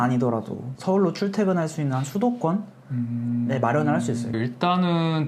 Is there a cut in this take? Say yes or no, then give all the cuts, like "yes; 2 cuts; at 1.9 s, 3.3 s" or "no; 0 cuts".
yes; 1 cut; at 4.3 s